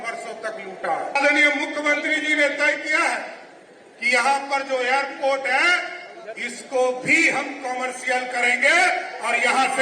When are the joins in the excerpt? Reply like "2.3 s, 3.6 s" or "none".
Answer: 1.1 s